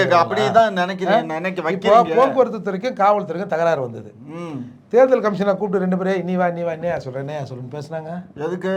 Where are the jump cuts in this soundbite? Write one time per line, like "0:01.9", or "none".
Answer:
none